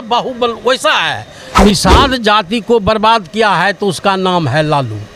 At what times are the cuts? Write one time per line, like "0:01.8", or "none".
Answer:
0:01.6

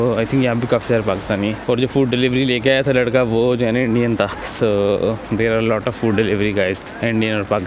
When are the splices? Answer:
none

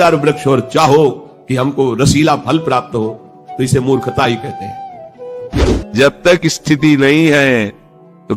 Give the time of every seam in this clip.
0:05.5

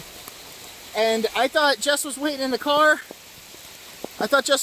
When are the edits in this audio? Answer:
none

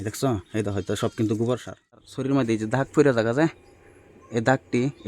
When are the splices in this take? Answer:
0:02.1

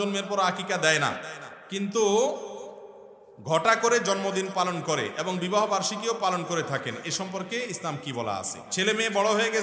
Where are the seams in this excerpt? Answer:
0:08.6

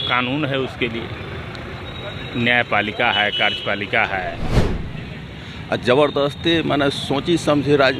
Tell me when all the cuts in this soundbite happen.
0:04.7

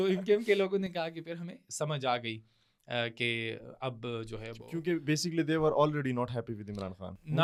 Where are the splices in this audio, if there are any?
none

